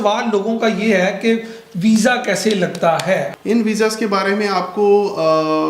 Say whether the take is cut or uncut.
cut